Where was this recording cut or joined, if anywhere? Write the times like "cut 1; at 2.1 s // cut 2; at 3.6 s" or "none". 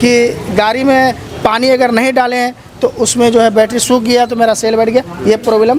none